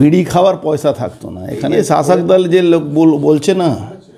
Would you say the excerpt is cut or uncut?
cut